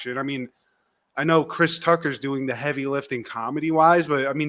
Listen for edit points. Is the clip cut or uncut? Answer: uncut